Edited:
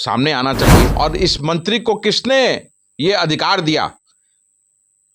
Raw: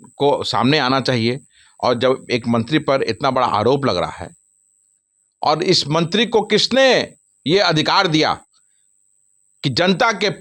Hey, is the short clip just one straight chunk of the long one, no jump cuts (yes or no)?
no